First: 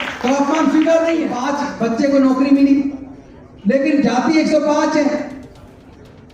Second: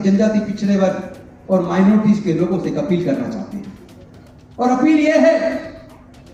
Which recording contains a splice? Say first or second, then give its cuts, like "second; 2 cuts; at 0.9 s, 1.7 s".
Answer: first; 1 cut; at 1.4 s